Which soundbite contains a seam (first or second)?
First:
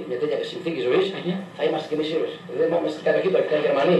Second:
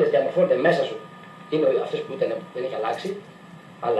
first